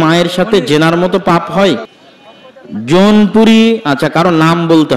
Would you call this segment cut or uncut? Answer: cut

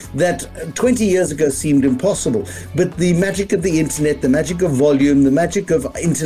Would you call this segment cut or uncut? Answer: uncut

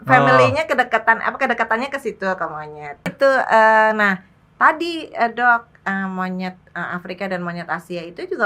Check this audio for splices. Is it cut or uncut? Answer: cut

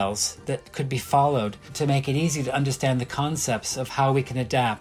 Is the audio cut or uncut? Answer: cut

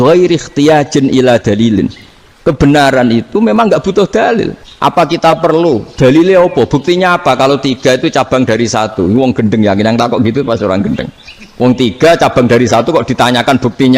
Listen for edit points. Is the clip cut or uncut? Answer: cut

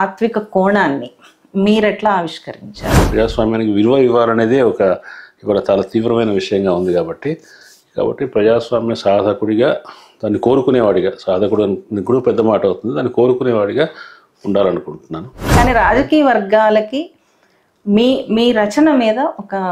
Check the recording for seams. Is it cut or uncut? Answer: cut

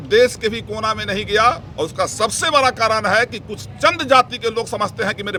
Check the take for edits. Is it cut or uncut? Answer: uncut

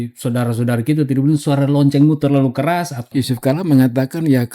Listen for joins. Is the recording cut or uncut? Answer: cut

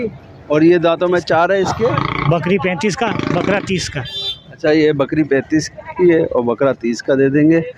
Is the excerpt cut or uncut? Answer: cut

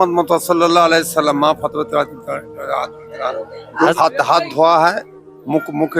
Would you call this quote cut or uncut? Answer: cut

